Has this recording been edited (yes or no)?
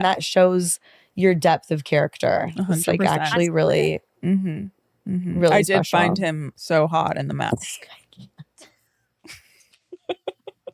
no